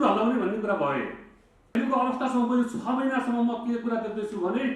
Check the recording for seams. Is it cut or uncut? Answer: cut